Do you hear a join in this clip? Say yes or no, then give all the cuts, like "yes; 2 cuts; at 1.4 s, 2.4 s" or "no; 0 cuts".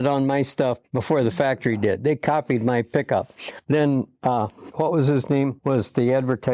yes; 2 cuts; at 4.6 s, 5.6 s